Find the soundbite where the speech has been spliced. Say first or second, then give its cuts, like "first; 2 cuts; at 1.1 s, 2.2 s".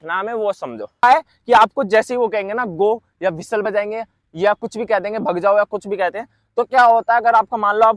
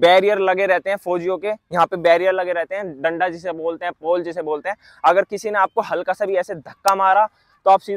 first; 1 cut; at 1.0 s